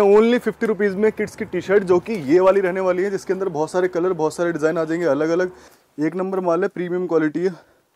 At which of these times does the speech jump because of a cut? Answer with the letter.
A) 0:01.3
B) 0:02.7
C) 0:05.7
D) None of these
C